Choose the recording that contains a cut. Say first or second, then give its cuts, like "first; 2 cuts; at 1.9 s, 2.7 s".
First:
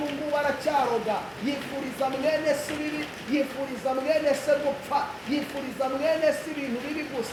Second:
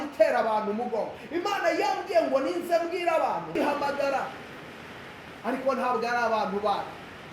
second; 1 cut; at 3.5 s